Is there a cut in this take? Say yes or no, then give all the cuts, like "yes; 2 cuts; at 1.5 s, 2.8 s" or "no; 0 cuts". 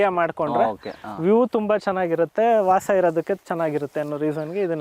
no; 0 cuts